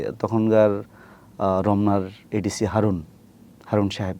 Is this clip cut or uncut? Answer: uncut